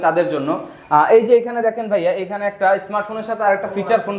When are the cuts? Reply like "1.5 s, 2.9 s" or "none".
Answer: none